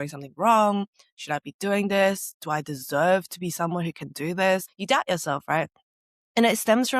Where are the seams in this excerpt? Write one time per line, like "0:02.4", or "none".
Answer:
0:04.6